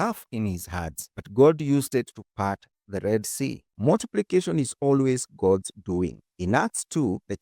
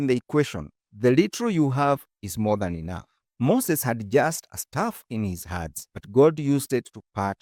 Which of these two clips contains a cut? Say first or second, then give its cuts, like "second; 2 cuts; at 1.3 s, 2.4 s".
first; 1 cut; at 3.7 s